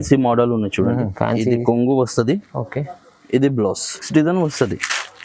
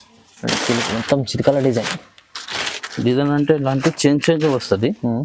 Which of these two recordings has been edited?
first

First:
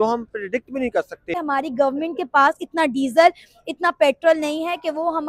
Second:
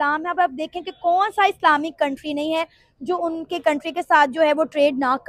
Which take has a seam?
first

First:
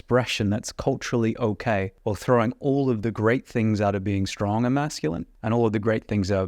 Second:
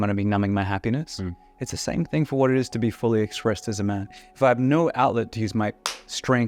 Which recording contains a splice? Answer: first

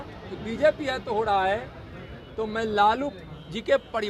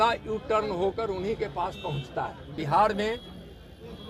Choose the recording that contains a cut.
second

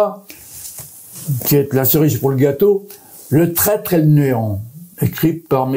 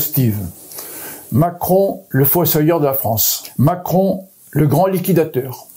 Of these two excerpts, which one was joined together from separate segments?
second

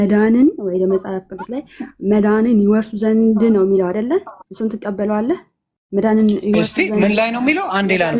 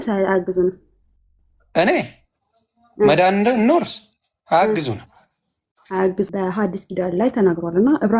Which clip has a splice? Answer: second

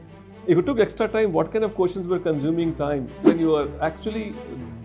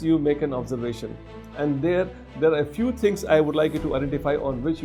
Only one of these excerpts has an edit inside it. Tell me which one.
first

